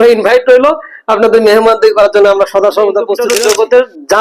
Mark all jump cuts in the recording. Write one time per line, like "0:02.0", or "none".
0:03.2